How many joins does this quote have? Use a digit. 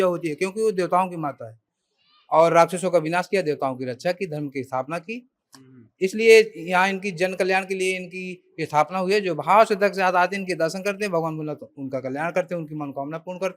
0